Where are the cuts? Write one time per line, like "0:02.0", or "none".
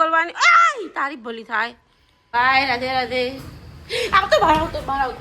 0:01.9